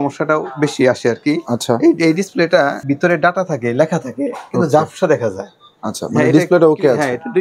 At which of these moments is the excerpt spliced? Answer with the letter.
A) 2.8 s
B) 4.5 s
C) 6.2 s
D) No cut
A